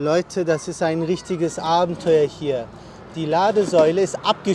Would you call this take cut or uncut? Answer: uncut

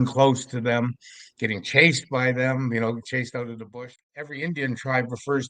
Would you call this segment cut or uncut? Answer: cut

